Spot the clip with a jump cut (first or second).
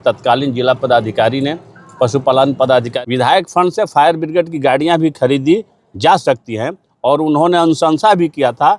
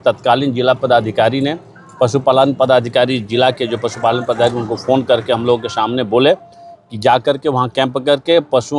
first